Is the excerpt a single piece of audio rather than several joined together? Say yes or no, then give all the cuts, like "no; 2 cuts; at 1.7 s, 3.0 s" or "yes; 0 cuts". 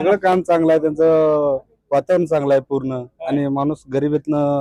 yes; 0 cuts